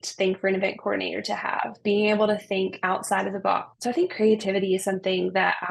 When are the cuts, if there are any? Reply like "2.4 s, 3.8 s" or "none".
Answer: 3.7 s

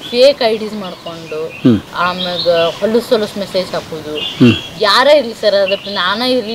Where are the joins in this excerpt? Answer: none

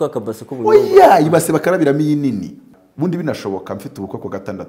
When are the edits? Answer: 2.7 s

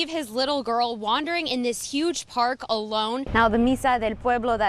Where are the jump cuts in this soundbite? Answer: 3.3 s

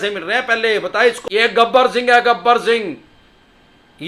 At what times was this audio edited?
1.2 s

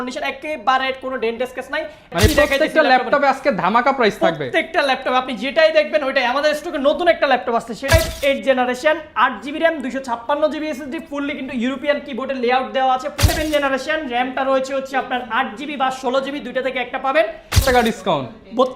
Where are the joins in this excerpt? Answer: 2.1 s, 7.9 s, 13.2 s, 17.6 s

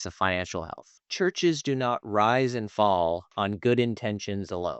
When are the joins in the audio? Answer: 1.0 s

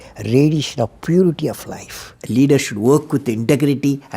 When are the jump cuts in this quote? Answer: 2.1 s

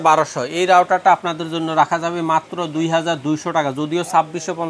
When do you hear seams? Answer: none

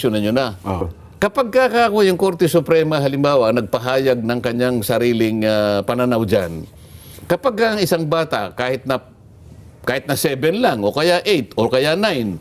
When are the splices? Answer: 0.9 s

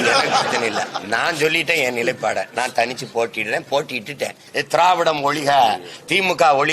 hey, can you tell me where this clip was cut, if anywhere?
4.4 s

